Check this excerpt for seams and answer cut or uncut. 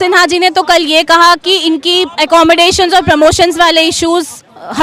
uncut